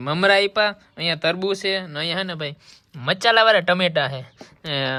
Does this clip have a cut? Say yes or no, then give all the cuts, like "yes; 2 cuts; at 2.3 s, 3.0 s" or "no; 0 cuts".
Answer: no; 0 cuts